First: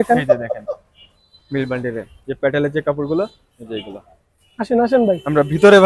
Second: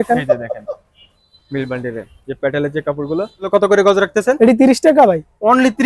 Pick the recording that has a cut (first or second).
second